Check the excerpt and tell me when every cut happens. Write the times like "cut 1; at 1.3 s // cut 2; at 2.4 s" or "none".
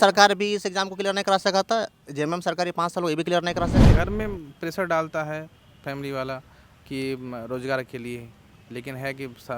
cut 1; at 3.9 s